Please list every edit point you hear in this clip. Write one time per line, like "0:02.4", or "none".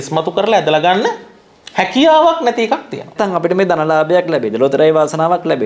0:03.1